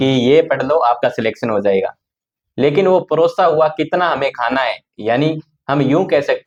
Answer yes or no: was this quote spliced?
no